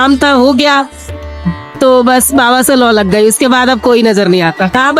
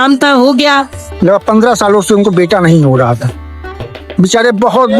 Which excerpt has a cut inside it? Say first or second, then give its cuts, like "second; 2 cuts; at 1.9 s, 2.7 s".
second; 1 cut; at 1.0 s